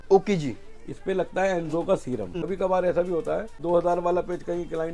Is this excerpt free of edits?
no; 2 cuts; at 2.3 s, 3.5 s

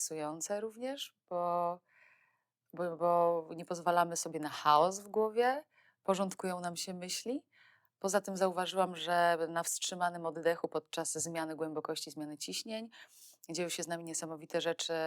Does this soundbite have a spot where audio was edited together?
no; 0 cuts

